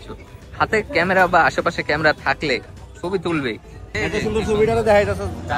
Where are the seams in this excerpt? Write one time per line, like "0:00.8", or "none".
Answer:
0:03.8